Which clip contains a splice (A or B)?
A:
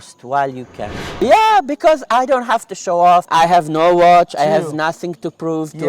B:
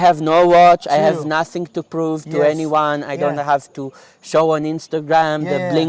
A